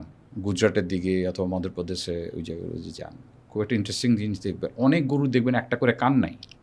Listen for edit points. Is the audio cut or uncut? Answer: uncut